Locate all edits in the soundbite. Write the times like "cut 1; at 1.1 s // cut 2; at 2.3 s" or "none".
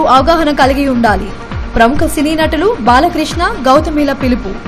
none